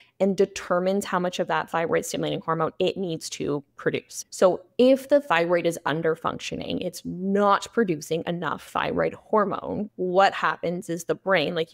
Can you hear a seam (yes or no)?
yes